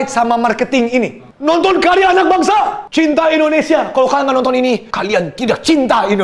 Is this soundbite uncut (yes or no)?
yes